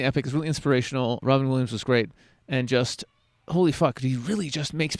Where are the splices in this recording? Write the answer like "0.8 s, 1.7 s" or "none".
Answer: 1.2 s